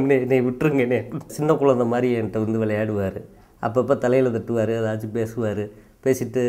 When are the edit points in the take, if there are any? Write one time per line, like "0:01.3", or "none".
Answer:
0:01.3